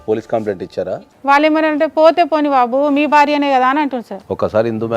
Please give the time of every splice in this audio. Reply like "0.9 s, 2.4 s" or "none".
0.9 s, 4.1 s